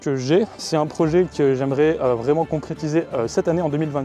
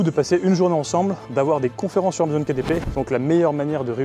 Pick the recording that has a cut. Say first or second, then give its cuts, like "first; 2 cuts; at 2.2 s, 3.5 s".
second; 2 cuts; at 1.2 s, 2.9 s